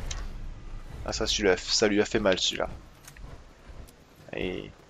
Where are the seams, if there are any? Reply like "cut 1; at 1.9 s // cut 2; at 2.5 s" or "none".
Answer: cut 1; at 2.2 s